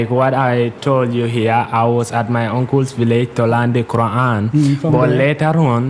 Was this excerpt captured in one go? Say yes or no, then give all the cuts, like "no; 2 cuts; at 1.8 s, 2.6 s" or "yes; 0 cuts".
yes; 0 cuts